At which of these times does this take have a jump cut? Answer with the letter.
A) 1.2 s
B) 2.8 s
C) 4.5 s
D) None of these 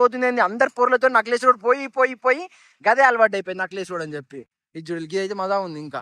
C